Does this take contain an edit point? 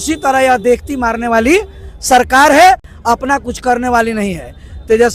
no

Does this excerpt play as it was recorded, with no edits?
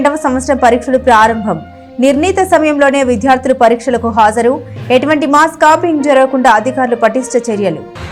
yes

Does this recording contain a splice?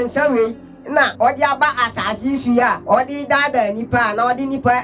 yes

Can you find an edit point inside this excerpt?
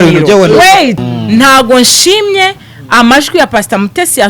yes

